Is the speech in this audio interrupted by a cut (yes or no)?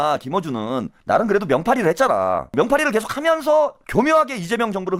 yes